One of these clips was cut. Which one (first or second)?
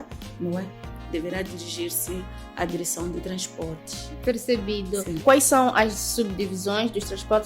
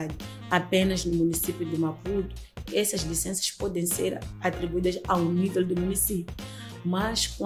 first